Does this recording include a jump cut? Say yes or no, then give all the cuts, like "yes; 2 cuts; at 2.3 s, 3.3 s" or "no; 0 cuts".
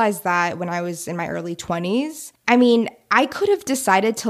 yes; 1 cut; at 2.3 s